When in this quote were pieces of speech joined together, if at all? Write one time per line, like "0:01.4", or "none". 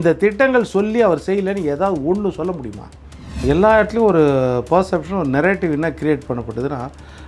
0:03.4